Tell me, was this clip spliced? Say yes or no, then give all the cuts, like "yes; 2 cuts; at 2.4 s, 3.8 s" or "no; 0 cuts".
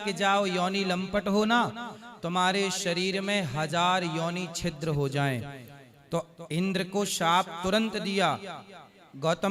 no; 0 cuts